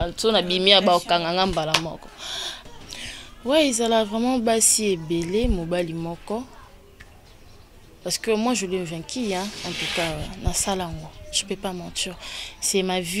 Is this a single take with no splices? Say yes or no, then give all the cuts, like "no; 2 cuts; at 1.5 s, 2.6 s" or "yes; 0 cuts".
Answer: no; 1 cut; at 2.5 s